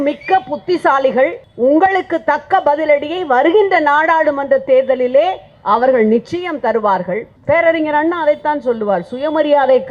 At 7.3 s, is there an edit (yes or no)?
yes